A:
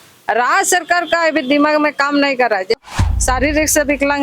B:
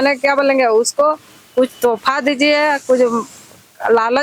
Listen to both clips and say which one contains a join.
A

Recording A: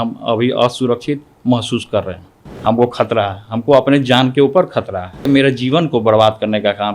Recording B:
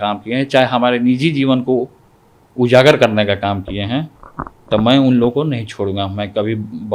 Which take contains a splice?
A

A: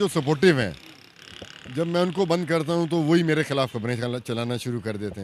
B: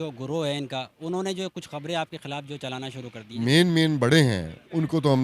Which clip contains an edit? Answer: B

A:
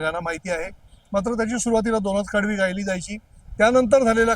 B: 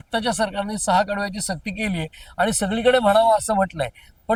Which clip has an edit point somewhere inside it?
A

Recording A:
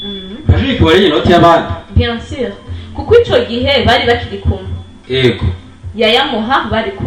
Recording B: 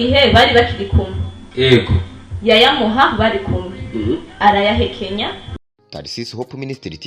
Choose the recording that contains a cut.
B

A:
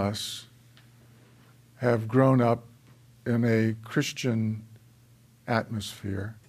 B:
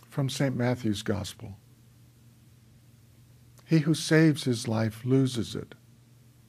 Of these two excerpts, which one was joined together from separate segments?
A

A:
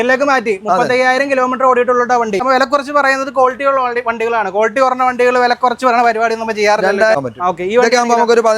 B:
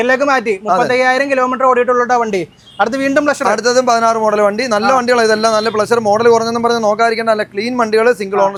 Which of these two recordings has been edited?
A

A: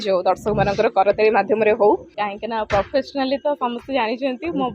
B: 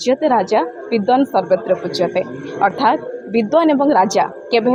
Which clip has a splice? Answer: A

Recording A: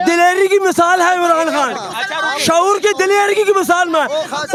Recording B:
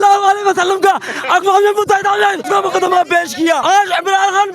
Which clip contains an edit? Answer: B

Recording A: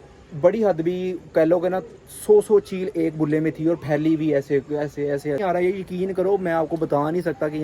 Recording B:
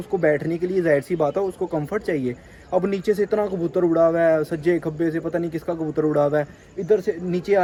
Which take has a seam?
A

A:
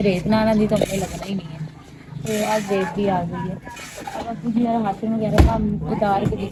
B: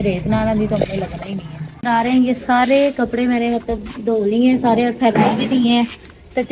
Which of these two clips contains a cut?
B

